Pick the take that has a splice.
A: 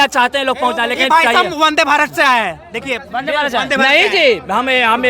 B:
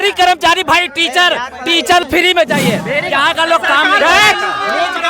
B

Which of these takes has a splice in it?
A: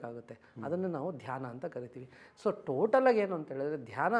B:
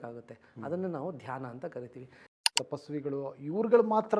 B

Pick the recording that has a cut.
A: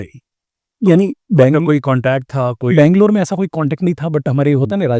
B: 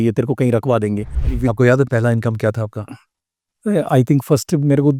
B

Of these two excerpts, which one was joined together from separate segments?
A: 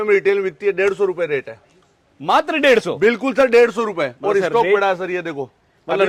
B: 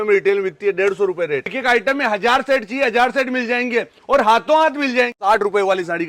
B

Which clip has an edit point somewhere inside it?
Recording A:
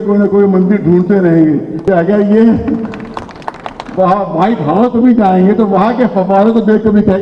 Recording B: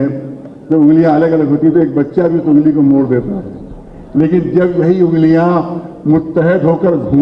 A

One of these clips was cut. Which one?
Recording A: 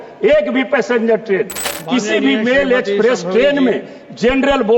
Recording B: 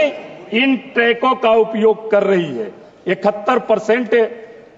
A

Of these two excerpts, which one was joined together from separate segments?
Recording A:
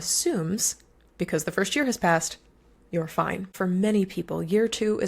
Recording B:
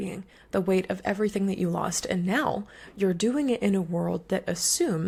A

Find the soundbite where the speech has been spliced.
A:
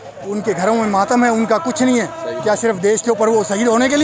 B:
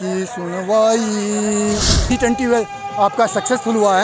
B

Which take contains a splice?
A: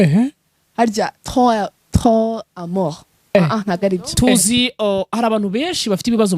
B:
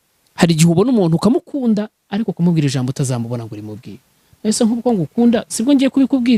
A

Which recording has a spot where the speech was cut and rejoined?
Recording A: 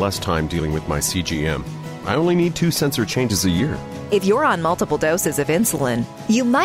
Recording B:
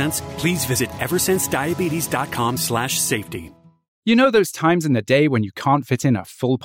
B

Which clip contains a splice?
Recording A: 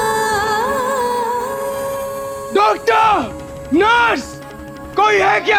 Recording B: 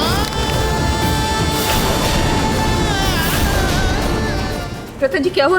B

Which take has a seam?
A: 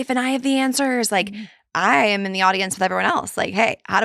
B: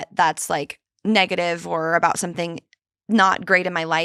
A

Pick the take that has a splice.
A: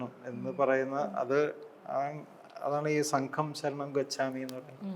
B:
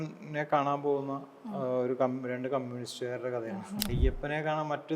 B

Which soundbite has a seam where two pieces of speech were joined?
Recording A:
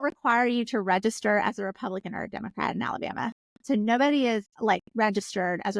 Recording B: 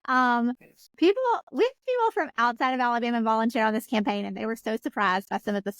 A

